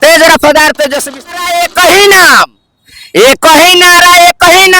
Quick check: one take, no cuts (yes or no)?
no